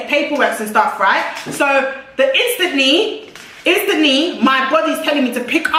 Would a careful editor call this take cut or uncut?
uncut